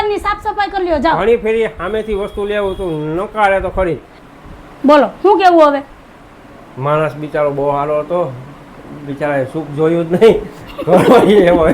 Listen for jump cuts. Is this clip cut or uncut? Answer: cut